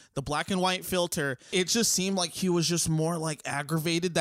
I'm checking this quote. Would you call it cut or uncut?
cut